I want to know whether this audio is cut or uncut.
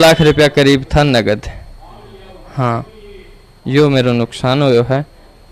uncut